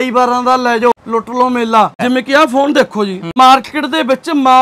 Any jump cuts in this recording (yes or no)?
yes